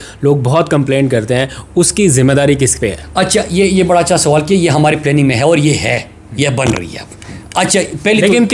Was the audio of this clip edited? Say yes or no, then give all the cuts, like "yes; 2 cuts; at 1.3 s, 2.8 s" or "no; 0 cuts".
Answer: no; 0 cuts